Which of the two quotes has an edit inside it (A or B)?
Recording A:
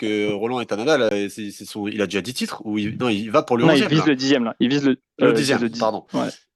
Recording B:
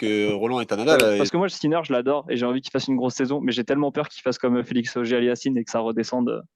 B